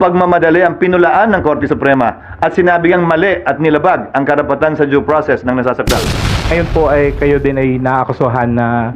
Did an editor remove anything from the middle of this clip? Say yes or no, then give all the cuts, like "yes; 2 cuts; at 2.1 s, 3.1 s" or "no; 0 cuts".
yes; 1 cut; at 6.5 s